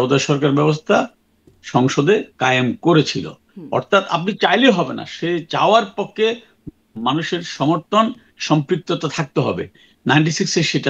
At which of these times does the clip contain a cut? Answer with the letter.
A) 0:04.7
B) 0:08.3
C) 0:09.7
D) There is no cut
D